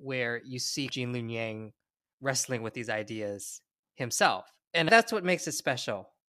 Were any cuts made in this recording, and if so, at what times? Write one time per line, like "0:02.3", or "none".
0:00.9
0:04.9